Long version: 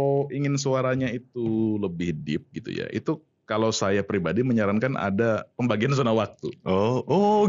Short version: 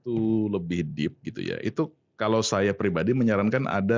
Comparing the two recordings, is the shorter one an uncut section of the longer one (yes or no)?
yes